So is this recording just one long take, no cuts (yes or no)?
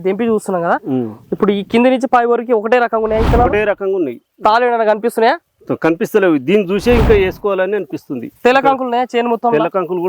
yes